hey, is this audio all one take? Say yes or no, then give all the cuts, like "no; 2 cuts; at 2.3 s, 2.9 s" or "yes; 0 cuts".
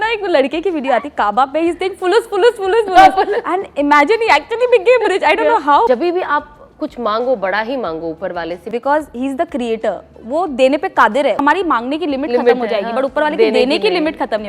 no; 3 cuts; at 5.9 s, 8.6 s, 11.4 s